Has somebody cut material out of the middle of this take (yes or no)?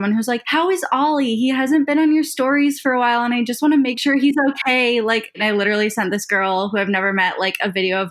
yes